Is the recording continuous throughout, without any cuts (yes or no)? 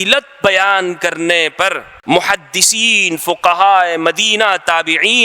no